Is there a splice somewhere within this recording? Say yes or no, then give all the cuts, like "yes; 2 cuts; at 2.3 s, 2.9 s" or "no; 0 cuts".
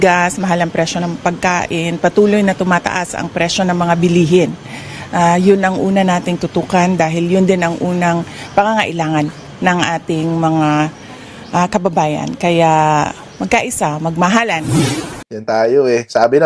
yes; 1 cut; at 15.2 s